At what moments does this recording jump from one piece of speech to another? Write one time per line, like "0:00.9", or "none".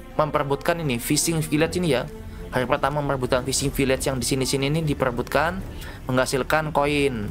none